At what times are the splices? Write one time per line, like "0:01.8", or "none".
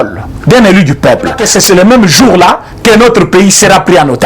0:01.4